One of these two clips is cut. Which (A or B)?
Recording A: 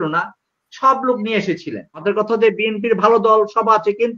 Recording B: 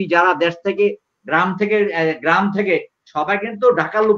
A